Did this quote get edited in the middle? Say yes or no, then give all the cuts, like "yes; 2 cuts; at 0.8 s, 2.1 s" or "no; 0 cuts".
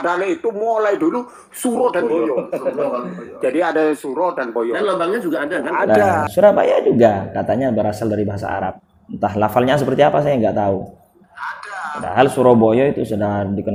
no; 0 cuts